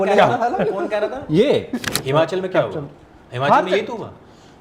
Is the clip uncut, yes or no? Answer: no